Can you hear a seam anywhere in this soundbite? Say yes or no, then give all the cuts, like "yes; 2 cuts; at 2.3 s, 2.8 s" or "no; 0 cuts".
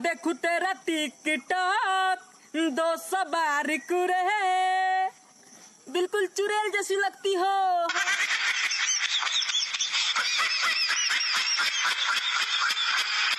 no; 0 cuts